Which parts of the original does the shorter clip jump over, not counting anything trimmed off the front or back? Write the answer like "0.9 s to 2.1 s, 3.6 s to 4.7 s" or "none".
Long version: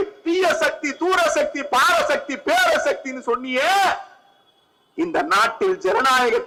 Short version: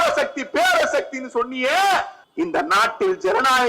4.1 s to 4.8 s